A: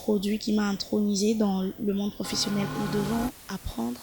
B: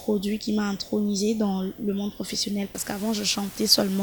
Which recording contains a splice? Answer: A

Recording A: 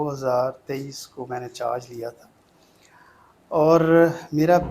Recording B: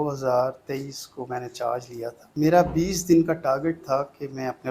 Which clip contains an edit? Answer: B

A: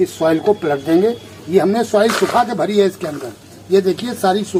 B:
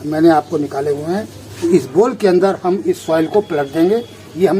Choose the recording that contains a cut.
B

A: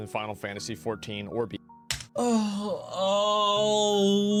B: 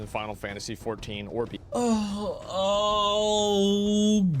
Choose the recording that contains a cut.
B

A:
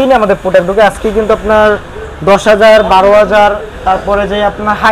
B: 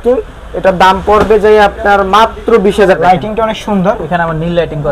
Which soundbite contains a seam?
B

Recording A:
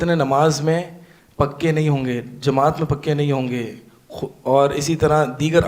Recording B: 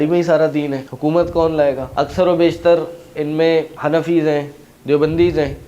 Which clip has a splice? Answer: B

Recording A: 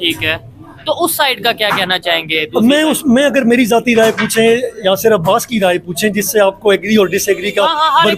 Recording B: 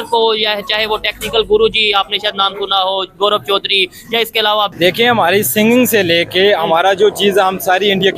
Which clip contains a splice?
B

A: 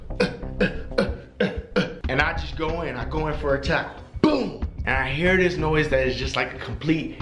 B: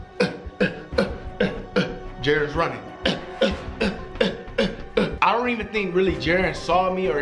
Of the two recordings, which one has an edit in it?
A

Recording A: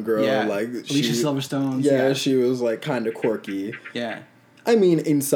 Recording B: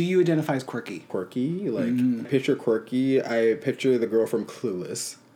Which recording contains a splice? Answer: B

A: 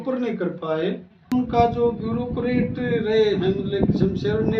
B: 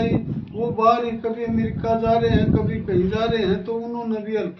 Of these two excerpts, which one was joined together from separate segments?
A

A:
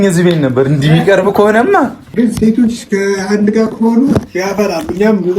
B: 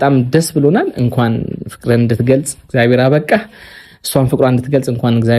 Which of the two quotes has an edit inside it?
A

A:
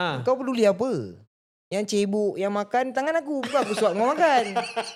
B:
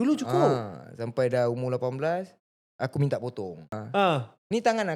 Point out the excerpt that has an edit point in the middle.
B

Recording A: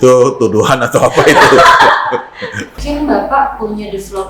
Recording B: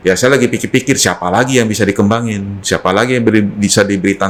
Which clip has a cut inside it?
A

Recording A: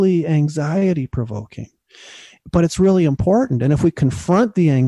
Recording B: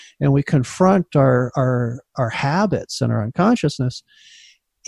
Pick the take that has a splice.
A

